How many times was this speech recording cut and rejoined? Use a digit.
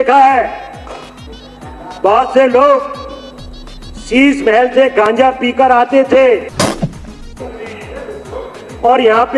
0